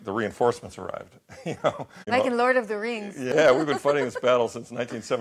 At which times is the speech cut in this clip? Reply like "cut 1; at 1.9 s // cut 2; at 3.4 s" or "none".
cut 1; at 2.0 s // cut 2; at 3.2 s